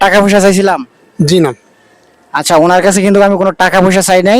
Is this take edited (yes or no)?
no